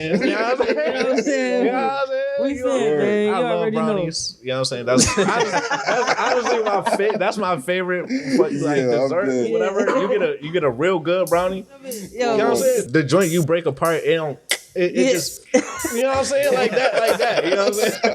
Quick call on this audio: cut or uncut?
cut